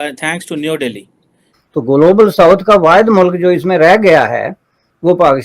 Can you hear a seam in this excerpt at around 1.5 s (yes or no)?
yes